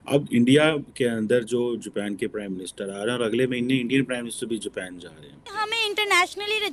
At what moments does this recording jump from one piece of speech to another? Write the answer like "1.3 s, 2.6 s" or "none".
5.5 s